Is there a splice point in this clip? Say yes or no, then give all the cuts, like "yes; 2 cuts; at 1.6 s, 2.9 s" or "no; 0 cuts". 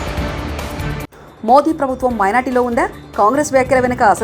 yes; 1 cut; at 1.1 s